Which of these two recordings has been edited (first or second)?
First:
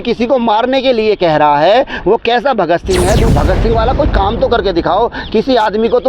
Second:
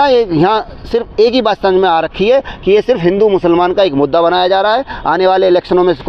first